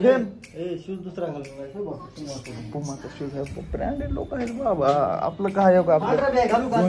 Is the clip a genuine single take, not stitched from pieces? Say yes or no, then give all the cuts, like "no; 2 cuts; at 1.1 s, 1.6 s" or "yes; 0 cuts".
yes; 0 cuts